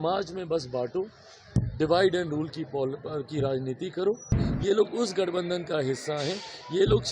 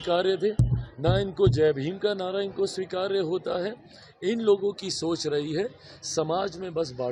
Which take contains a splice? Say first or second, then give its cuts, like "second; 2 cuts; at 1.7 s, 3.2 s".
first; 1 cut; at 4.4 s